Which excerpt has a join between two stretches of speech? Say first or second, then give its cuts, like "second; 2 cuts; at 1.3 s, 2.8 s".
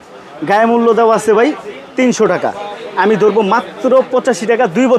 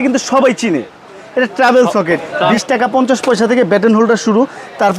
second; 1 cut; at 2.3 s